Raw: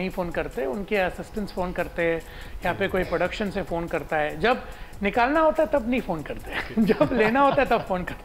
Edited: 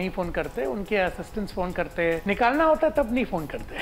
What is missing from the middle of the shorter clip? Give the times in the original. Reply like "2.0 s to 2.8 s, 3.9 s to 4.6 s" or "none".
2.2 s to 5.0 s